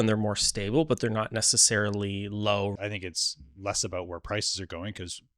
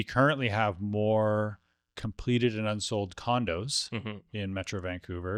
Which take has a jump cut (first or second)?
first